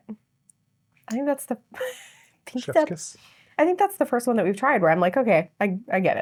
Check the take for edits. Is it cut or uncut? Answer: uncut